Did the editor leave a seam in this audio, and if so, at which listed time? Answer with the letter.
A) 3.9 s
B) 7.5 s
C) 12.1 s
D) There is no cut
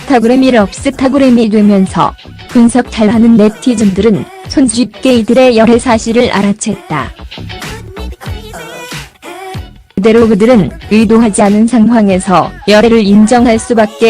B